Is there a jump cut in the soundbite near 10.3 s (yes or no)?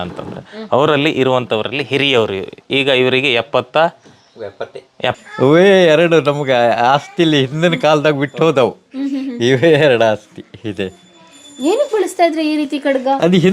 no